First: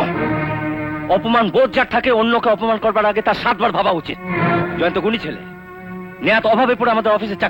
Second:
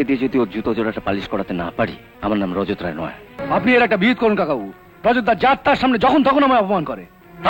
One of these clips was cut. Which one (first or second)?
second